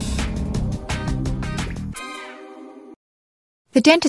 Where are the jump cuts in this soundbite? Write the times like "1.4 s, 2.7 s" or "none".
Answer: 2.9 s